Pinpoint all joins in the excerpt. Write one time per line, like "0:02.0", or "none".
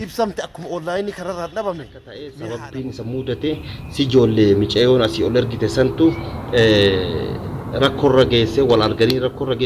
0:02.3